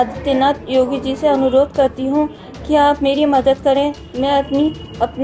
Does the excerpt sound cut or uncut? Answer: cut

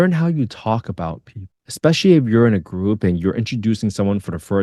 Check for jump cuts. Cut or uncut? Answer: uncut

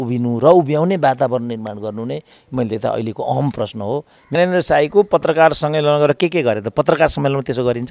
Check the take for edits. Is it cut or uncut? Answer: cut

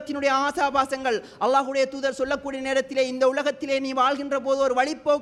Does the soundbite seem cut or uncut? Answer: uncut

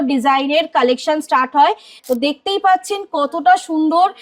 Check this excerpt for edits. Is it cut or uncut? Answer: cut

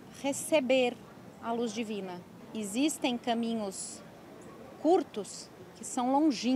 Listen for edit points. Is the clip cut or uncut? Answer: cut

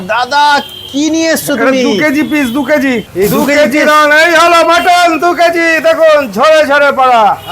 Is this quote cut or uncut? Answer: cut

